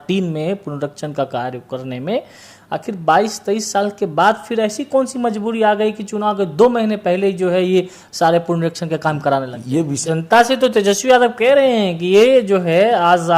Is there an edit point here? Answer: yes; 1 cut; at 9.9 s

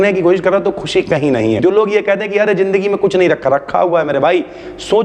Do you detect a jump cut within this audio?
yes; 1 cut; at 1.6 s

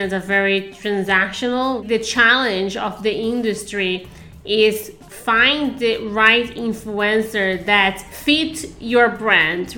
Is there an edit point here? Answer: yes; 2 cuts; at 1.8 s, 8.1 s

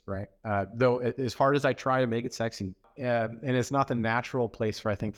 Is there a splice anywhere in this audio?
yes; 1 cut; at 2.9 s

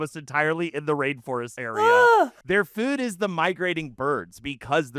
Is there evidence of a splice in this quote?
yes; 2 cuts; at 1.5 s, 2.4 s

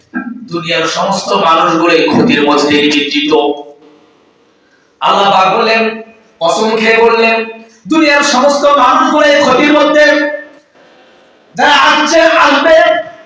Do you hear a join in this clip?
no; 0 cuts

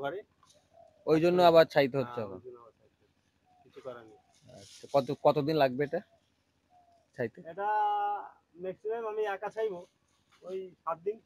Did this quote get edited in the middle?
no; 0 cuts

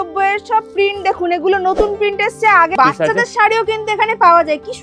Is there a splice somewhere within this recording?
yes; 1 cut; at 2.7 s

